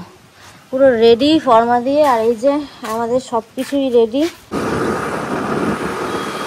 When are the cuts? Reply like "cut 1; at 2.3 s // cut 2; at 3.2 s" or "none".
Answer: cut 1; at 4.6 s